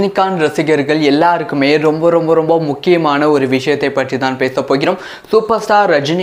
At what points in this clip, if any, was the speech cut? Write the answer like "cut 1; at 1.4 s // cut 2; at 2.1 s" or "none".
none